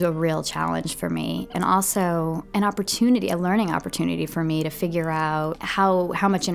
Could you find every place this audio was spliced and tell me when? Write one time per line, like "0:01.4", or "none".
0:01.5
0:02.4
0:05.6